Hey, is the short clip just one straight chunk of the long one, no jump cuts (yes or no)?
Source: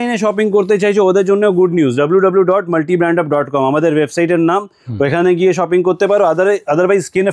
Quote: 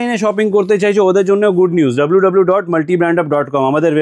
yes